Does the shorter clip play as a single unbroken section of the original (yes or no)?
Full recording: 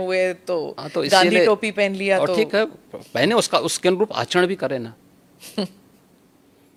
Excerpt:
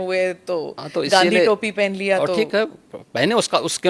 yes